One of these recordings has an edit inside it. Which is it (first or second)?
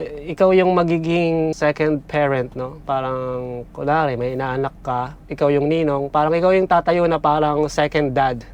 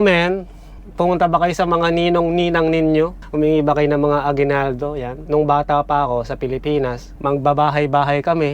second